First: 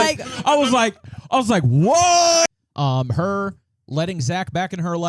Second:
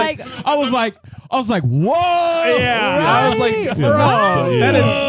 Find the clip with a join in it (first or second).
first